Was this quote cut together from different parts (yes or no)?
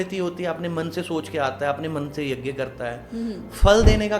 no